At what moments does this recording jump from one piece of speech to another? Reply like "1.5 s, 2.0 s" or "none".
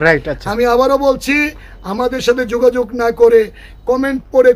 none